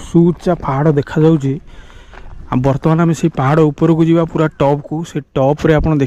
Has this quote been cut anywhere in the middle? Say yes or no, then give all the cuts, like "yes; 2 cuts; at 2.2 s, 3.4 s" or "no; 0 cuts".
no; 0 cuts